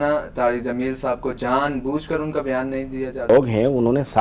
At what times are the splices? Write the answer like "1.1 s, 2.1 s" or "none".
3.3 s